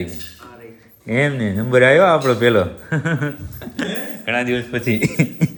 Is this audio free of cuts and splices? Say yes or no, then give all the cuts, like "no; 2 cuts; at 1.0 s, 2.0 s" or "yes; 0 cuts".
yes; 0 cuts